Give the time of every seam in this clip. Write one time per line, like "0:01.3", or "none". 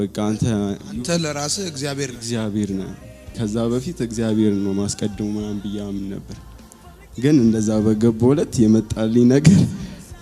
0:03.3